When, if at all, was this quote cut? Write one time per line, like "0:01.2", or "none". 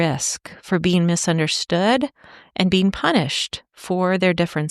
none